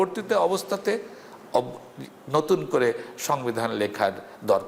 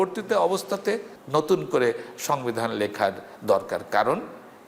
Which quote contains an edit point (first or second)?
second